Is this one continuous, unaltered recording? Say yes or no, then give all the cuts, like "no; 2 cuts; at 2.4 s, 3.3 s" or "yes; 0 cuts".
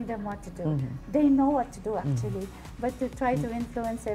yes; 0 cuts